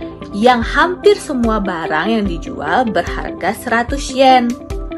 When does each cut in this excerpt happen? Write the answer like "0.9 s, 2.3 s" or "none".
none